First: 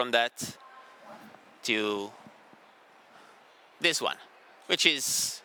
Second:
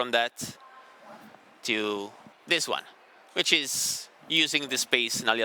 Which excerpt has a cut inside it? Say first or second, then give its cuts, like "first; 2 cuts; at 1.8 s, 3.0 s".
second; 1 cut; at 2.3 s